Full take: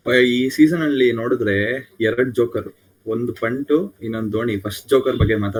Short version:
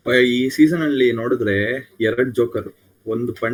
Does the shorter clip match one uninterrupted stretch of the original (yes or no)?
yes